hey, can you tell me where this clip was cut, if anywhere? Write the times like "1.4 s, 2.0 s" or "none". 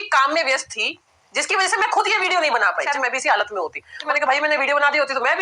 2.9 s, 4.1 s